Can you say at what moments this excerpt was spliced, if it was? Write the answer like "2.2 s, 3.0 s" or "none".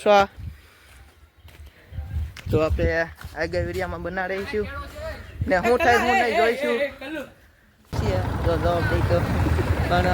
7.9 s

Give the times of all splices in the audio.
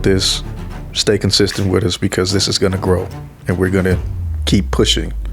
none

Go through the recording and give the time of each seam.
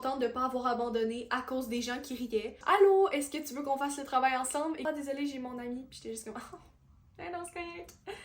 2.6 s, 4.9 s

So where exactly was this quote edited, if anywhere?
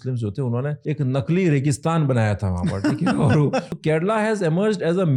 0.8 s, 3.7 s

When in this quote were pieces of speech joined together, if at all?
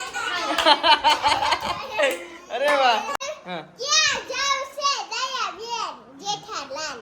3.2 s

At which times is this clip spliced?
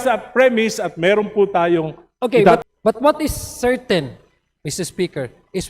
2.6 s

